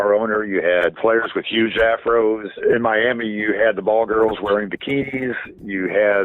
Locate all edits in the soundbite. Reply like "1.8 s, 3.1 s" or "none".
1.0 s, 2.5 s